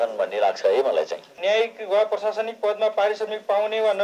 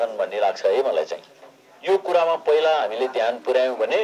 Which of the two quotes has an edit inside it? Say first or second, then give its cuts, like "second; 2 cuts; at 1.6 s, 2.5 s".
first; 1 cut; at 1.2 s